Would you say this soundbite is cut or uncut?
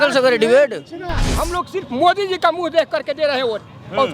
cut